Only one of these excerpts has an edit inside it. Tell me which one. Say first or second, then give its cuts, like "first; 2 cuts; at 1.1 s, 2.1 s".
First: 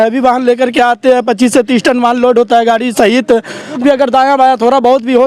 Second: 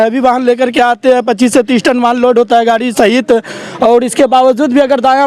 first; 1 cut; at 3.7 s